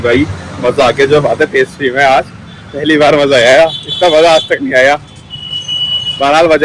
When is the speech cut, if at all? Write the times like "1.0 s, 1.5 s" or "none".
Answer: none